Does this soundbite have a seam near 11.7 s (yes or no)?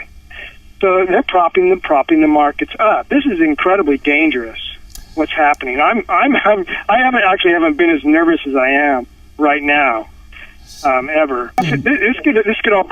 yes